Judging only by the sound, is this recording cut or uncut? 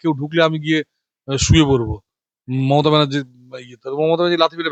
uncut